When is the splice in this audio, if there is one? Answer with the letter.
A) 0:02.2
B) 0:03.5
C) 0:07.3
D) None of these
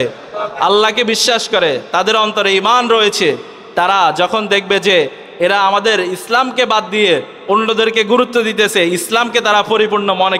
D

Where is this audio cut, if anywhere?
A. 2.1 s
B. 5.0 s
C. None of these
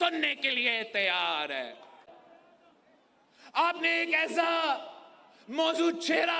A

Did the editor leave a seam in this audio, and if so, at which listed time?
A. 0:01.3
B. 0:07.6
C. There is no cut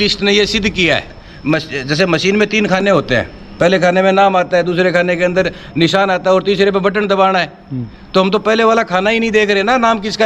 A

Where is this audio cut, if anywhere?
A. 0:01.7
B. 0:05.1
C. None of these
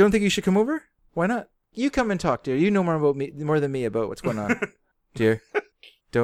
A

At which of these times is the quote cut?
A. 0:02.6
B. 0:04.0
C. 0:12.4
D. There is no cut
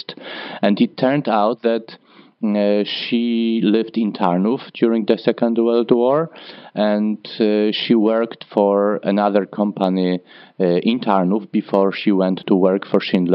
C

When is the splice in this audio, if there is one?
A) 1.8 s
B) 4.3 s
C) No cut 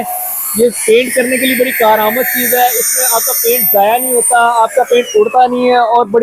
C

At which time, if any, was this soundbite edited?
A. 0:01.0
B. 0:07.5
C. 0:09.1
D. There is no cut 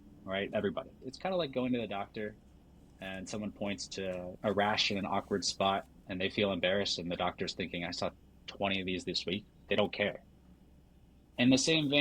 A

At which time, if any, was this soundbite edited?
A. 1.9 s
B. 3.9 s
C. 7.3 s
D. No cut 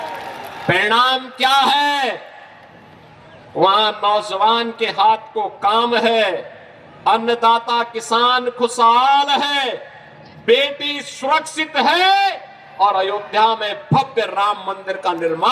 D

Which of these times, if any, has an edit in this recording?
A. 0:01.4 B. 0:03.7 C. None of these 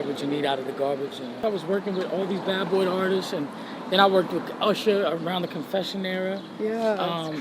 A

